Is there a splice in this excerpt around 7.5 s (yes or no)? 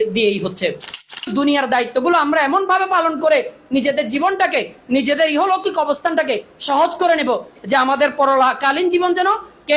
no